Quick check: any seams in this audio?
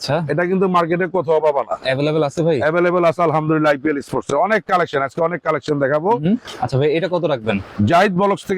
yes; 2 cuts; at 6.5 s, 7.7 s

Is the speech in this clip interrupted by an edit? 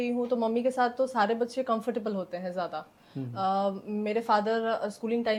no; 0 cuts

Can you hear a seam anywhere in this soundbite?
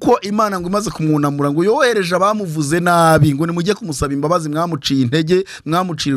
no; 0 cuts

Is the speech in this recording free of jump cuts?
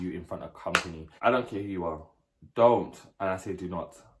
no; 1 cut; at 1.0 s

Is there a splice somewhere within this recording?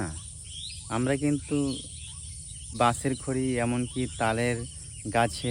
yes; 1 cut; at 2.8 s

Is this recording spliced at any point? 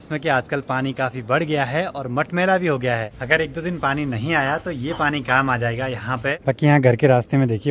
yes; 2 cuts; at 3.2 s, 6.4 s

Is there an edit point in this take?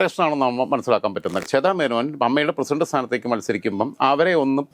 yes; 1 cut; at 1.4 s

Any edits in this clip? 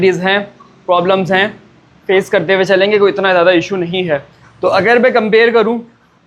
no; 0 cuts

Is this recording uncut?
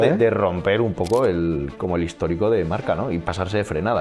yes; 0 cuts

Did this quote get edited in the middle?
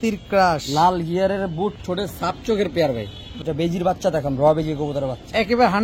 yes; 1 cut; at 3.3 s

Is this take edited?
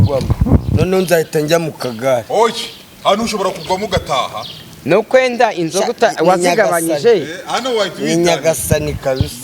no; 0 cuts

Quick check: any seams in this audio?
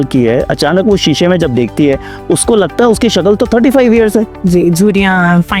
no; 0 cuts

